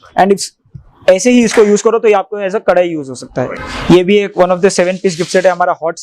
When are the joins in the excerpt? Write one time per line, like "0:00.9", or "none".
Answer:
0:03.5